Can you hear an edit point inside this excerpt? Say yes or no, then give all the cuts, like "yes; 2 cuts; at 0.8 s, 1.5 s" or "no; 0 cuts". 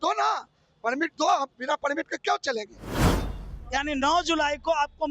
yes; 1 cut; at 3.2 s